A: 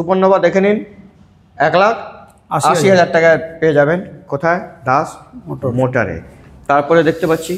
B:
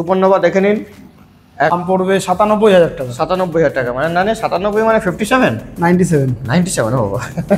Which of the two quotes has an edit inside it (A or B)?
B